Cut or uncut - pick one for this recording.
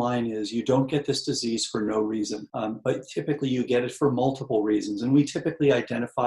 cut